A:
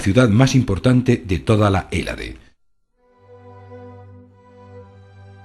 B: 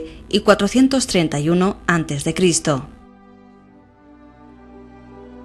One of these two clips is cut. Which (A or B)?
A